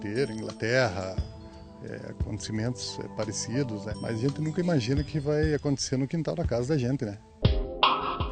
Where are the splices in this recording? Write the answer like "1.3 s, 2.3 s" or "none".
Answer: 3.9 s, 7.3 s